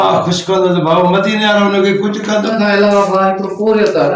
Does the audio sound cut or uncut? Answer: cut